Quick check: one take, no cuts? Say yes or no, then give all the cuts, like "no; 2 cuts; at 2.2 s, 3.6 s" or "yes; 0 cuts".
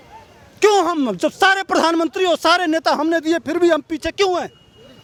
yes; 0 cuts